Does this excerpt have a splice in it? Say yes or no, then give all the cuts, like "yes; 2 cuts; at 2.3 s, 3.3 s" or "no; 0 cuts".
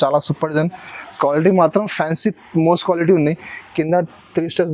no; 0 cuts